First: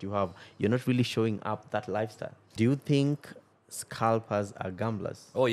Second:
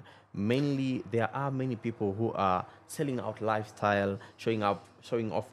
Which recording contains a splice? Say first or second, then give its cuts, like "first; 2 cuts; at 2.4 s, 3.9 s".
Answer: first; 1 cut; at 2.4 s